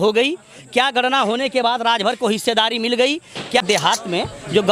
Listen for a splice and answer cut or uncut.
cut